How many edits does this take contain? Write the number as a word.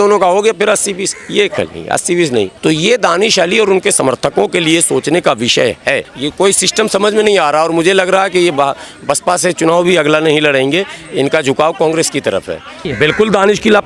three